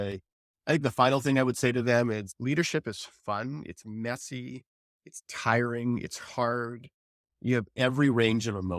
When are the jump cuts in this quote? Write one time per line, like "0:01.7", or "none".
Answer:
none